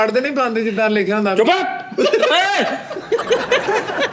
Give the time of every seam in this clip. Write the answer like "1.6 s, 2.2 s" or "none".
none